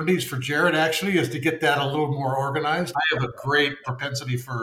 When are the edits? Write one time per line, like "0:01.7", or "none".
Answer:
0:02.9
0:03.8